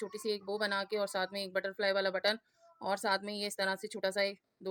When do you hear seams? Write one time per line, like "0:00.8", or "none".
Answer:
none